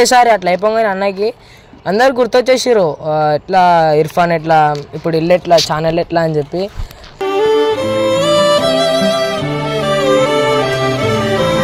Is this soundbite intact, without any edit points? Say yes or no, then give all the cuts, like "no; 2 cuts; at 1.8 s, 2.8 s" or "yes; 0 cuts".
yes; 0 cuts